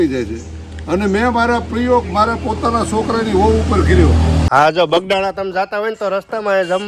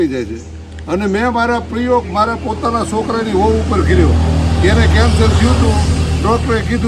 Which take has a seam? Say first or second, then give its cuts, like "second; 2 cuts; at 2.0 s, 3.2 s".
first; 1 cut; at 4.5 s